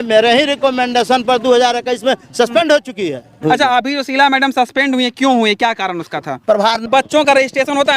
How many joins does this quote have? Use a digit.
2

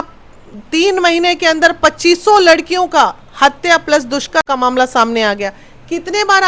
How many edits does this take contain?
1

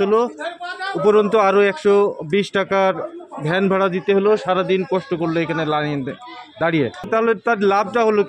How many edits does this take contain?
1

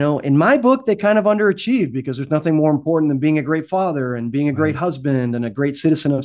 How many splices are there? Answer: 0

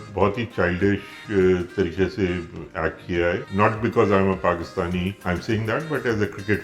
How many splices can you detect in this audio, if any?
2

